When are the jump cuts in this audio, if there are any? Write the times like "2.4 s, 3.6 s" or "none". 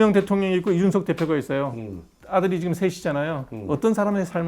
none